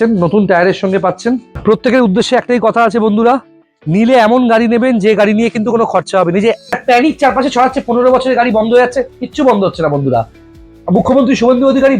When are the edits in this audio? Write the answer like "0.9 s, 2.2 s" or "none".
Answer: 1.5 s, 6.7 s